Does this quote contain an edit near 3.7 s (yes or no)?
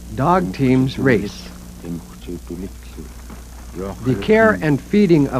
yes